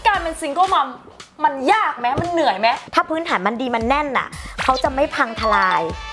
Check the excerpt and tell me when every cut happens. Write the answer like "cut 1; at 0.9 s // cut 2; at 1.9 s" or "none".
cut 1; at 2.8 s